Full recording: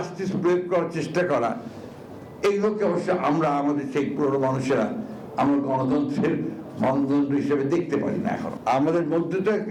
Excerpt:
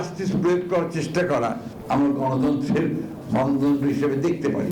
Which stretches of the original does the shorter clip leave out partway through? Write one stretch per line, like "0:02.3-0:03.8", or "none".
0:01.7-0:05.2